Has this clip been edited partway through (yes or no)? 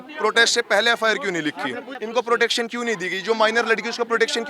yes